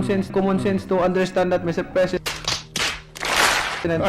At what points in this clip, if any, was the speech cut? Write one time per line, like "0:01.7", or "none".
none